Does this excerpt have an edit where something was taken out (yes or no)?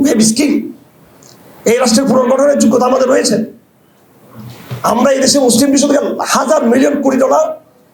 no